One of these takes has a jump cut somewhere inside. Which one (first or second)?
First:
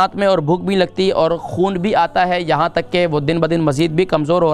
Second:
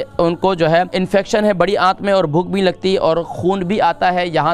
second